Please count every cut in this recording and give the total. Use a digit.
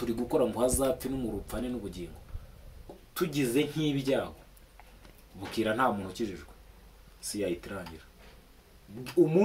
1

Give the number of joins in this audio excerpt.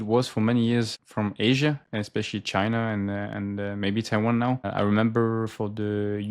2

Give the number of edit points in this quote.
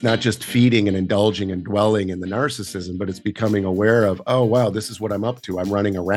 0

